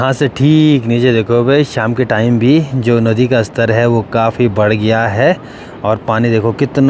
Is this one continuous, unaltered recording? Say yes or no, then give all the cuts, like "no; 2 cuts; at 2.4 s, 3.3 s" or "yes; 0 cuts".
yes; 0 cuts